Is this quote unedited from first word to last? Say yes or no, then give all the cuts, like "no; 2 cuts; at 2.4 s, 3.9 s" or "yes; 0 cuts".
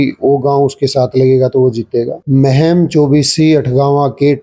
yes; 0 cuts